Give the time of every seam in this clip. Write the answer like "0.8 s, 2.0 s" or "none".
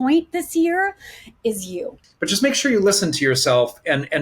2.0 s

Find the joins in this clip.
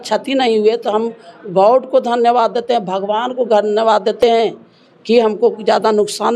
none

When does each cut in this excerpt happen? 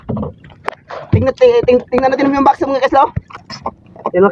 3.3 s

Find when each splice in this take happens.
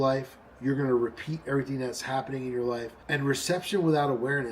3.0 s

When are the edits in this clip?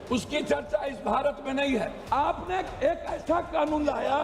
2.0 s

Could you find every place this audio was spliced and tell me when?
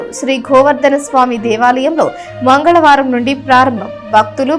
none

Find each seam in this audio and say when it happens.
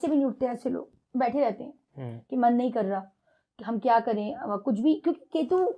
none

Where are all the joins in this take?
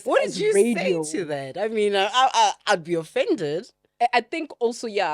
3.8 s

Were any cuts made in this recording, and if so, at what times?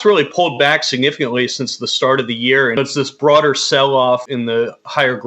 2.8 s, 4.3 s

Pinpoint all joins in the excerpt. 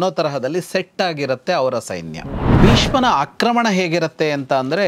2.6 s

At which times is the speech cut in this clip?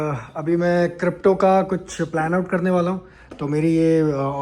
none

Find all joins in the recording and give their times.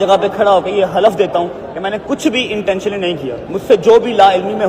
3.4 s

